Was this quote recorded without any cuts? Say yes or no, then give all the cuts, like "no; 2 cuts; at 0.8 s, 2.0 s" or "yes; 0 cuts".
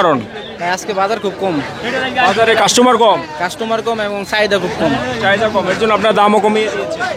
yes; 0 cuts